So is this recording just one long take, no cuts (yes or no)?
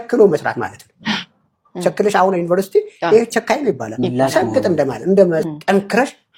yes